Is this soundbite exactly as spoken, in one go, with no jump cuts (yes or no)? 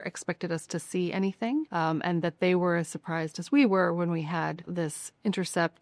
no